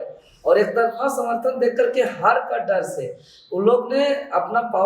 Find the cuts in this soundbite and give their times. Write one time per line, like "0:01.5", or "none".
none